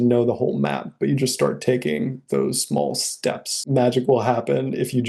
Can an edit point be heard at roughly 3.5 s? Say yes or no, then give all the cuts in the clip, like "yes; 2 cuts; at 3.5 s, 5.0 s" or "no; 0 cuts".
yes; 1 cut; at 3.5 s